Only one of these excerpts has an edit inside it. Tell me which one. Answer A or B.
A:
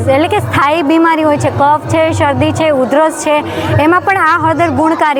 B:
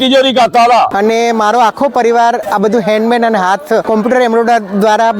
B